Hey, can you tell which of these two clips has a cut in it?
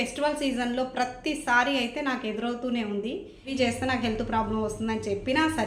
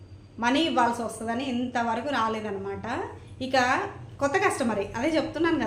first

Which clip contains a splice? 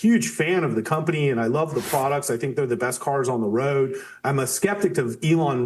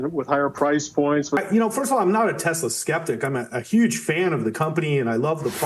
second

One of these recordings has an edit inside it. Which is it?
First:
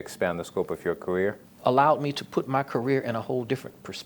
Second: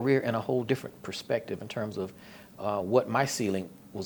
first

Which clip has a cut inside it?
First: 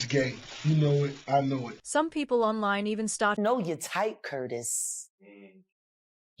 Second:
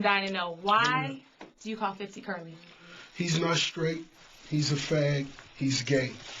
first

